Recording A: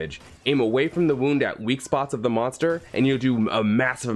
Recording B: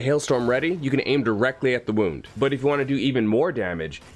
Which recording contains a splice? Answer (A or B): B